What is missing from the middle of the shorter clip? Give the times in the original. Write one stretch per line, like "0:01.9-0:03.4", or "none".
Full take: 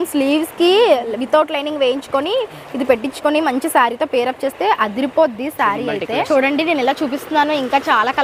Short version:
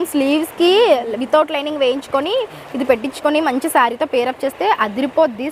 none